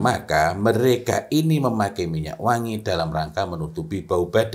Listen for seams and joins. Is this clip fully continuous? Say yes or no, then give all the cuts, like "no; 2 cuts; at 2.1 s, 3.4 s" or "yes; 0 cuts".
yes; 0 cuts